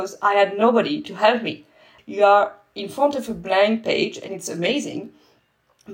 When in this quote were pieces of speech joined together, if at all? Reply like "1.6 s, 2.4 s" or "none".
1.9 s